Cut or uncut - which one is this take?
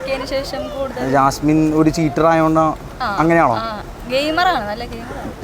uncut